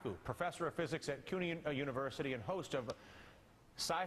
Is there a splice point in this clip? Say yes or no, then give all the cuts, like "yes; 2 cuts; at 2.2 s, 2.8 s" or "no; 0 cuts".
no; 0 cuts